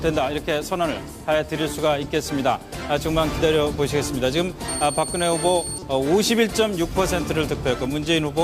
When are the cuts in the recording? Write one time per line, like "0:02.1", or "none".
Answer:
0:02.7